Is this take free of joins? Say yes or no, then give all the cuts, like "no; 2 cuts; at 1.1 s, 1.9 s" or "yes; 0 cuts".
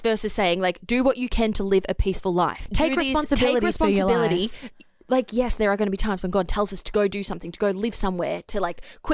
no; 1 cut; at 2.7 s